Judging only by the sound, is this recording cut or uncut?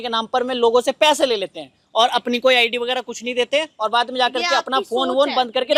uncut